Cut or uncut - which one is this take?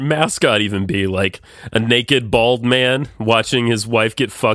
uncut